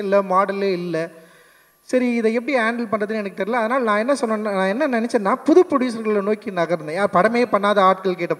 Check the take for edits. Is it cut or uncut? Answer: uncut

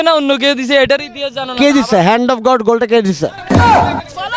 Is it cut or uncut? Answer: uncut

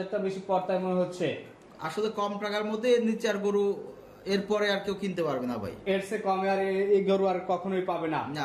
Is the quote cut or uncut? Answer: uncut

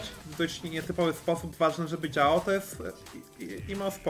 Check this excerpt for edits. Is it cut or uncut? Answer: uncut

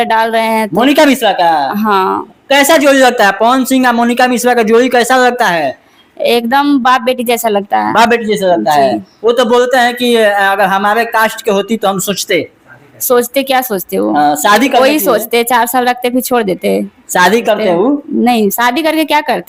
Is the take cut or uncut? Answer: uncut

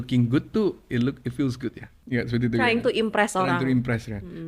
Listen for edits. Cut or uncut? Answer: cut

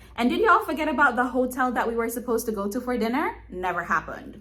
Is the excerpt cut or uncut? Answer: uncut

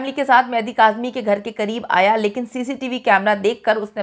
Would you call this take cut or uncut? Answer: uncut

